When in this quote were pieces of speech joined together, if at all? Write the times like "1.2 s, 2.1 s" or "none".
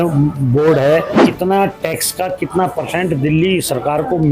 1.2 s